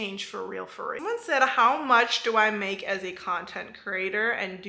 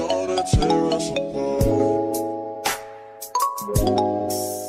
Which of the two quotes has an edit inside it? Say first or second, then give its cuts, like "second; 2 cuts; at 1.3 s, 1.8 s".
first; 1 cut; at 0.9 s